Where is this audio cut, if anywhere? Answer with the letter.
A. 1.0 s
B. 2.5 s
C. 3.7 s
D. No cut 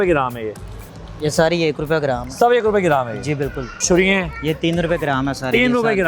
C